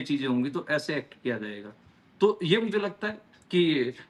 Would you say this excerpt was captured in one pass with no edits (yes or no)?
yes